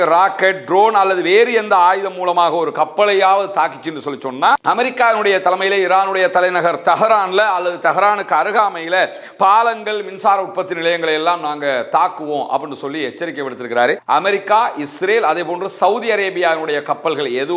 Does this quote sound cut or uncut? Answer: cut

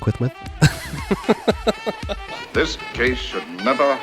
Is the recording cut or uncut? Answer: cut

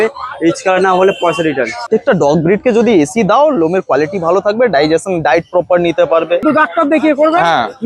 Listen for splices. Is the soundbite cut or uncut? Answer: cut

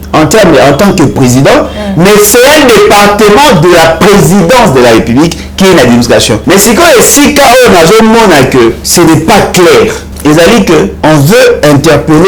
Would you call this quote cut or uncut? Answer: cut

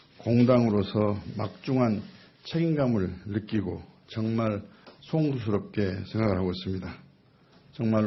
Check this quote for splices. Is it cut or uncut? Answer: uncut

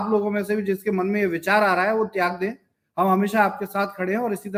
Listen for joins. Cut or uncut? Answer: uncut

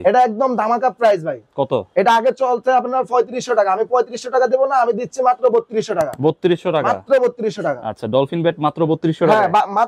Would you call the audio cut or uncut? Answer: uncut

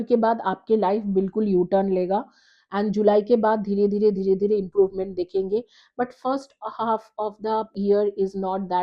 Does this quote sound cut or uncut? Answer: cut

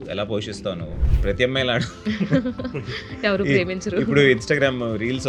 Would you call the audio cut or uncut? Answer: cut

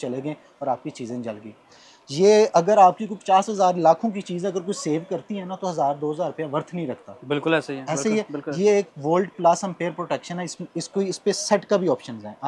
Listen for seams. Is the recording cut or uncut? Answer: uncut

